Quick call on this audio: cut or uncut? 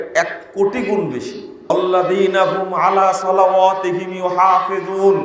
cut